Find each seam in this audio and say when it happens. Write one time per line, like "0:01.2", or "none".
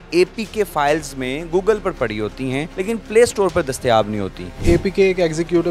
0:02.7
0:04.6

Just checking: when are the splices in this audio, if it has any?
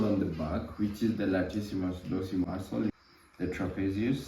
0:03.0

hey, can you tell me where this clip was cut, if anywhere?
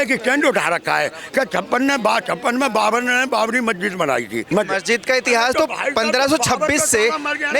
0:04.4

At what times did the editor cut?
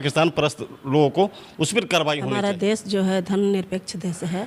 0:02.3

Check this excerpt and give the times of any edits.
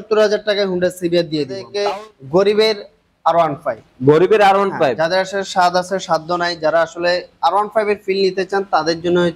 0:01.7

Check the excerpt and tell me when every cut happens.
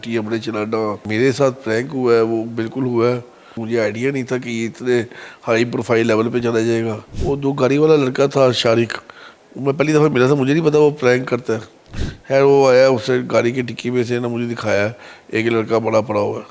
0:01.0
0:03.6
0:07.1

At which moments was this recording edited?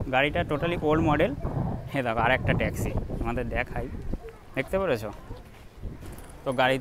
none

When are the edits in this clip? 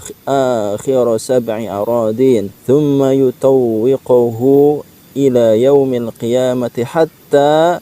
0:02.5

